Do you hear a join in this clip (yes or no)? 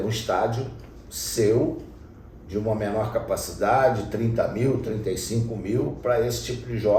no